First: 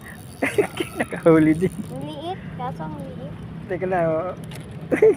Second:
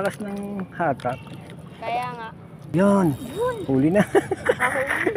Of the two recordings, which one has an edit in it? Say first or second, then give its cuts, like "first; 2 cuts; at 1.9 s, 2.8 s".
second; 1 cut; at 2.7 s